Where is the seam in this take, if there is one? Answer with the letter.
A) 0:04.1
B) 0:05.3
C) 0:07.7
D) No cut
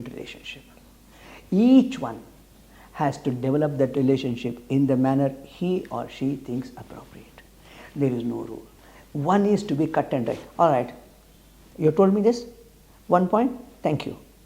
D